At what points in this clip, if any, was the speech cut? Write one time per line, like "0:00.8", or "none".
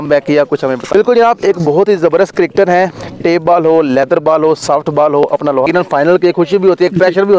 0:00.8
0:05.7